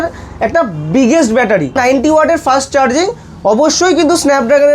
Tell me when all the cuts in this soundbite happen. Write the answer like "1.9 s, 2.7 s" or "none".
1.8 s